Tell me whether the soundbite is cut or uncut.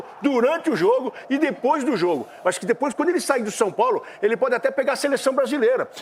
uncut